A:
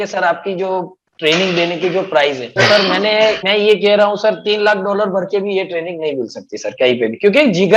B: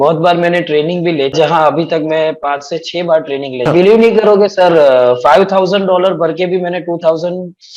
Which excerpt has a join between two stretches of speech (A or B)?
B